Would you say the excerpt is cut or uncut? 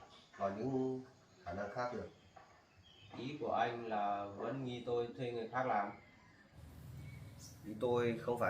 cut